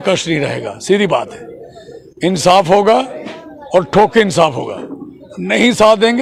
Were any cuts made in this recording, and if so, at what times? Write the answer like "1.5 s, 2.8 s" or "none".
none